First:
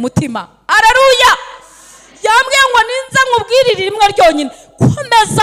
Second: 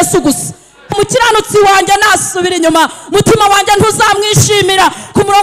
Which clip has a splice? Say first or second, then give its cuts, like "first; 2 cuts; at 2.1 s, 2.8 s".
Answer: second; 1 cut; at 1.0 s